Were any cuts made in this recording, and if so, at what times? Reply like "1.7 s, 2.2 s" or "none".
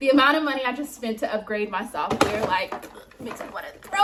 none